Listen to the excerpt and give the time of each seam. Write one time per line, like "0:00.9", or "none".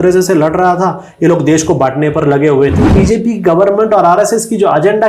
0:02.9